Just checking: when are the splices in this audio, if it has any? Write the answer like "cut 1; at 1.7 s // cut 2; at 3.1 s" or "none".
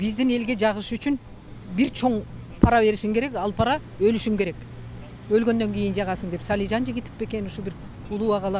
none